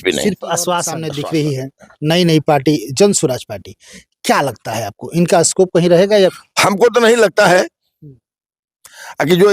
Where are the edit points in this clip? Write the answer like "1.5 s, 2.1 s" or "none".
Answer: 1.1 s, 6.3 s

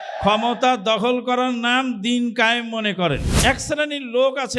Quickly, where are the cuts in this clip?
3.3 s

